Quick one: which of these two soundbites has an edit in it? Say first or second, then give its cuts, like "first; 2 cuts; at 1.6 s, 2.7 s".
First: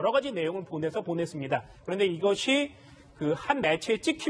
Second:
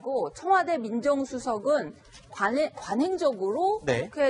second; 1 cut; at 3.4 s